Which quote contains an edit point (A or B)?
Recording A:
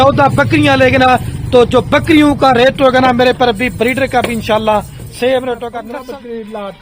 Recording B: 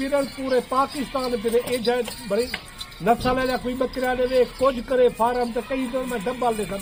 A